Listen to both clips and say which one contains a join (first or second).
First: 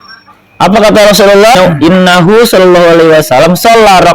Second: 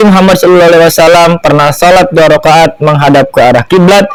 first